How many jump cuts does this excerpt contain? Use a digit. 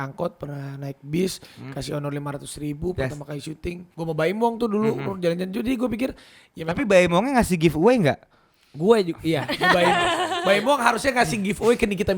1